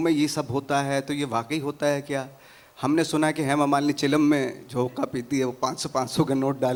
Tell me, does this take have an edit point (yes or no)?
no